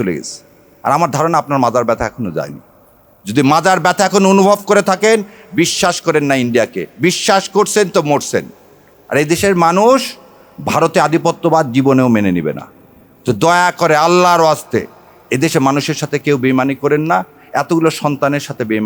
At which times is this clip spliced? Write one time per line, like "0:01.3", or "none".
none